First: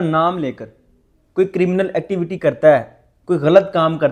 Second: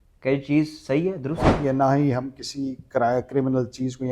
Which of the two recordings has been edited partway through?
second; 1 cut; at 1.5 s

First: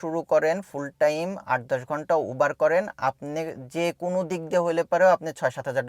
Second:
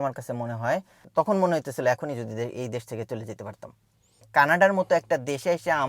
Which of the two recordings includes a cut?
second; 2 cuts; at 1.0 s, 4.1 s

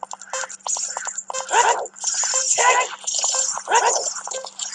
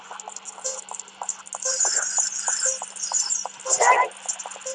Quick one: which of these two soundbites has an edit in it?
first; 1 cut; at 3.8 s

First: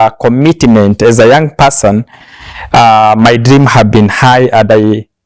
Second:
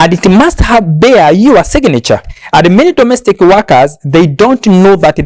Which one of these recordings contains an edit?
second; 1 cut; at 2.4 s

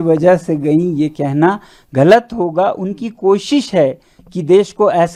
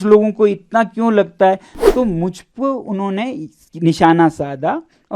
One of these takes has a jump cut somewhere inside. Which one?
second; 1 cut; at 1.7 s

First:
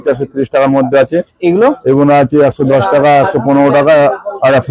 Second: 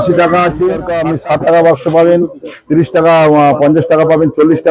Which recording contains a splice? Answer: second; 1 cut; at 1.0 s

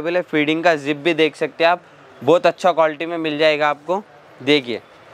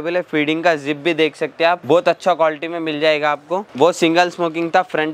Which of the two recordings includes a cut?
second; 2 cuts; at 1.8 s, 3.7 s

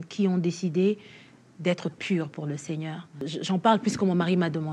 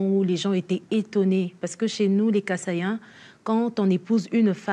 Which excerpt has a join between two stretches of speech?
first; 1 cut; at 3.3 s

